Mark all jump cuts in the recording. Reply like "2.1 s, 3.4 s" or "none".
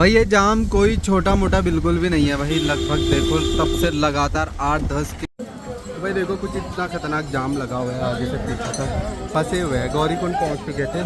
5.2 s